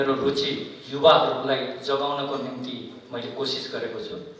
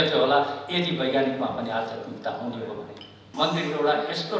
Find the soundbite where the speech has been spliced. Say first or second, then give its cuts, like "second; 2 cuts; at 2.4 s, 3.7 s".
second; 1 cut; at 3.2 s